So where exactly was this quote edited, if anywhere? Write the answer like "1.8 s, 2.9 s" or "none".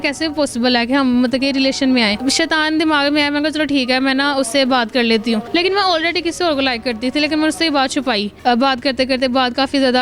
2.2 s, 5.4 s, 8.3 s